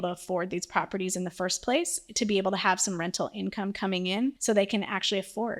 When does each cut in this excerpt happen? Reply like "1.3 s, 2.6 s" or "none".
4.4 s